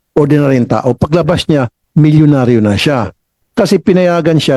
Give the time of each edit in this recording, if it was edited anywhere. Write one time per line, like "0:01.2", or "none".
none